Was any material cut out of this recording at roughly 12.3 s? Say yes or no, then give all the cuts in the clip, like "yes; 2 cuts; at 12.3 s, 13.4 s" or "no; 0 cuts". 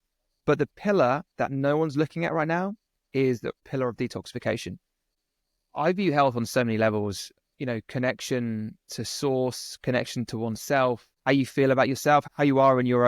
yes; 4 cuts; at 3.6 s, 5.2 s, 11.1 s, 12.3 s